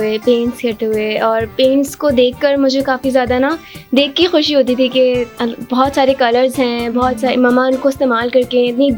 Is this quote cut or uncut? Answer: uncut